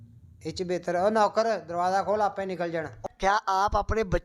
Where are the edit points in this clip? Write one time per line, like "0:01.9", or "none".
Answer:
0:03.1